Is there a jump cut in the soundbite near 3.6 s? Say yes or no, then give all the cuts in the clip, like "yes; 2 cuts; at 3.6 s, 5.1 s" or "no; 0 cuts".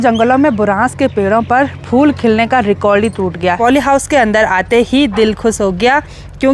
yes; 1 cut; at 3.6 s